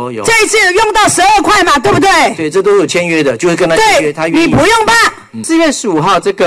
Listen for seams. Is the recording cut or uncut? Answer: cut